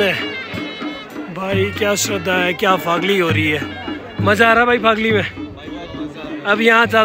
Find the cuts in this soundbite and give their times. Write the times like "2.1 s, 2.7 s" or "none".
none